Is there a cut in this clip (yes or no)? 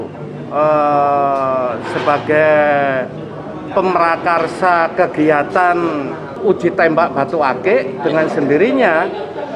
yes